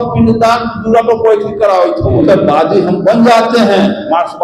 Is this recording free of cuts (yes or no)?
no